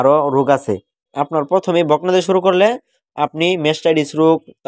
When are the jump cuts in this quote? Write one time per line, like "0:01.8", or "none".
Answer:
0:01.0